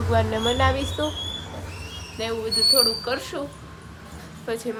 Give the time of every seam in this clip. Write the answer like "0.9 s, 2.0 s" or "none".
none